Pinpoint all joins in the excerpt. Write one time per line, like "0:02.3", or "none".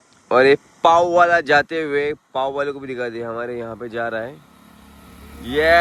none